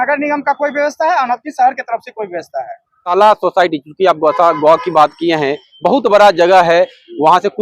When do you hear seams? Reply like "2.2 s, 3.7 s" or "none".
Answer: 3.1 s